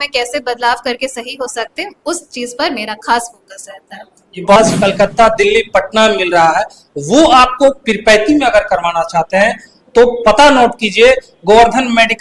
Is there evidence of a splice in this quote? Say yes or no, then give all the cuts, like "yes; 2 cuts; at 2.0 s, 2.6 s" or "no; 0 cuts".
yes; 1 cut; at 4.6 s